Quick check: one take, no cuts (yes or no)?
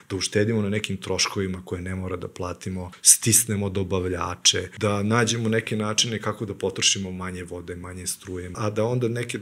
no